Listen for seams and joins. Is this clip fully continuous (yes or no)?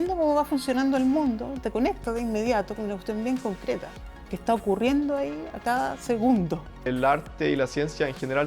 no